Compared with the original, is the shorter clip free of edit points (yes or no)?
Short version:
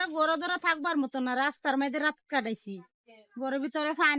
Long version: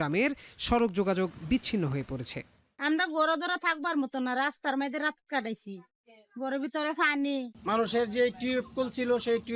yes